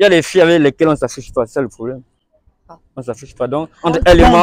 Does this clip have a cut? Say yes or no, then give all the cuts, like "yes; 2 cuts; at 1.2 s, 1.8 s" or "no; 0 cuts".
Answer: no; 0 cuts